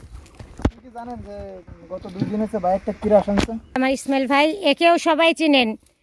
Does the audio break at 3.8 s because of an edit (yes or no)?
yes